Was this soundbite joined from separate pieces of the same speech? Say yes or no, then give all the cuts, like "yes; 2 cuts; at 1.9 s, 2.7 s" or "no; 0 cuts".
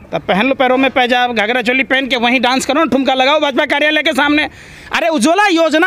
no; 0 cuts